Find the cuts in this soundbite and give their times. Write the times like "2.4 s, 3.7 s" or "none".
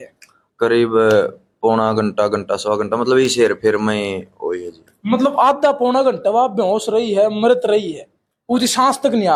none